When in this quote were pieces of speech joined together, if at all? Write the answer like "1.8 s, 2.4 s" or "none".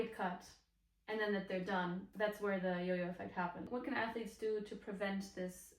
2.1 s, 3.7 s